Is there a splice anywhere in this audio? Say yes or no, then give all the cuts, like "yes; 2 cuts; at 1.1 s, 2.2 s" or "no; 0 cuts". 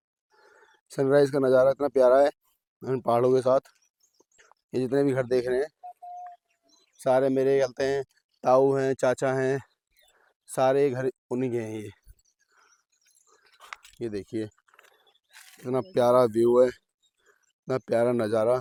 no; 0 cuts